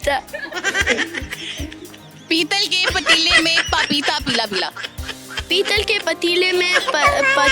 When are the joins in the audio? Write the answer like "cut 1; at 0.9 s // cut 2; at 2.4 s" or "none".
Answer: none